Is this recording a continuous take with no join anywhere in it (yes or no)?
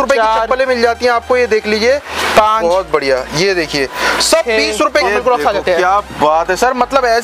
no